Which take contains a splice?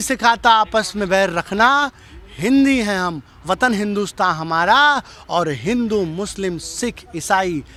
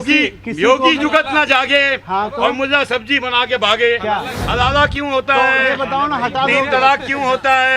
second; 1 cut; at 4.4 s

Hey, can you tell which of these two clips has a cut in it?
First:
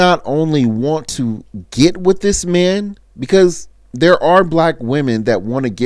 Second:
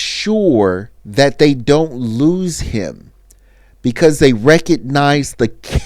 second; 1 cut; at 0.9 s

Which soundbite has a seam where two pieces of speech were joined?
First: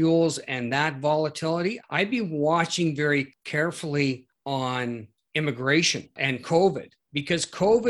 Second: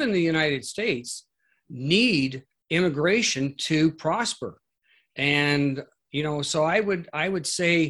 first; 5 cuts; at 1.8 s, 3.4 s, 4.3 s, 5.1 s, 6.1 s

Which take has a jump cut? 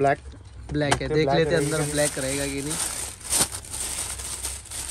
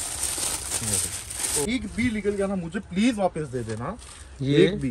second; 1 cut; at 1.7 s

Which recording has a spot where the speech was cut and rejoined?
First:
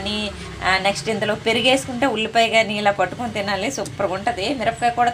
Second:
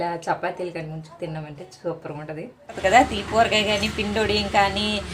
second; 1 cut; at 2.8 s

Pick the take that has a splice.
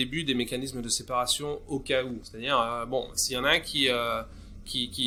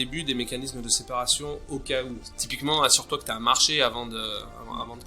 second; 1 cut; at 2.3 s

